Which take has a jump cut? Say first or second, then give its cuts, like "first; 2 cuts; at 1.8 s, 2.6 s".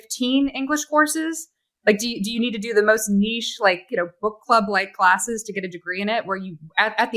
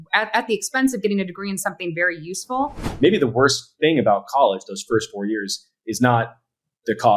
second; 1 cut; at 2.8 s